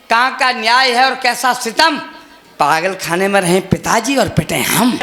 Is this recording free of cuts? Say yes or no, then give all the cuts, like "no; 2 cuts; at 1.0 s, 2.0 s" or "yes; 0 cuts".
yes; 0 cuts